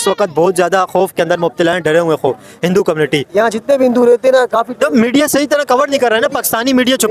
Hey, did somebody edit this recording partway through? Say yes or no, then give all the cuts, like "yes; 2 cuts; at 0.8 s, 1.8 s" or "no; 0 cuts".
yes; 1 cut; at 3.3 s